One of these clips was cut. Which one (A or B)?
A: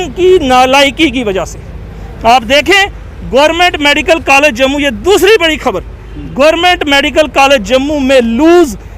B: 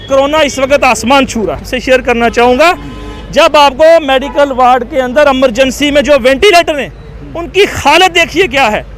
B